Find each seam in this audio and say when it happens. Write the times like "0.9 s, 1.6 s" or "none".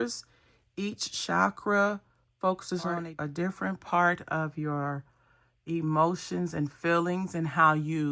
3.0 s